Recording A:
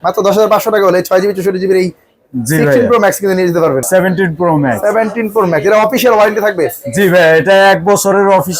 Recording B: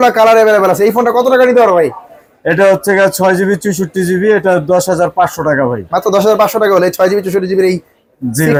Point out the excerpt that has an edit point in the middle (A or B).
A